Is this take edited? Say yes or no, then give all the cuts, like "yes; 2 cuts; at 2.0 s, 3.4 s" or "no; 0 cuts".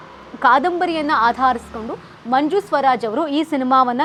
no; 0 cuts